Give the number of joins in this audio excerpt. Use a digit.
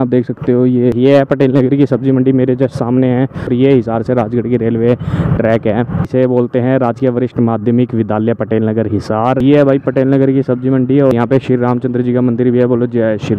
5